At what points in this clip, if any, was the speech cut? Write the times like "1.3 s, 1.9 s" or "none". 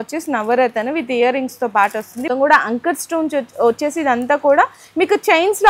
2.2 s